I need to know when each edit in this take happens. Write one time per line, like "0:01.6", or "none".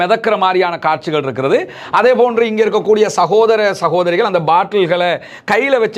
none